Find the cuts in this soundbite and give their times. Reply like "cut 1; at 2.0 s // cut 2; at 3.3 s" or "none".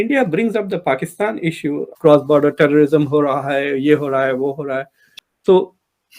cut 1; at 2.0 s // cut 2; at 5.2 s